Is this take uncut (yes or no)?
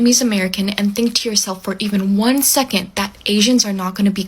yes